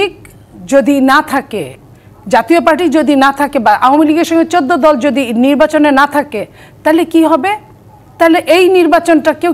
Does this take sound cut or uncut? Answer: uncut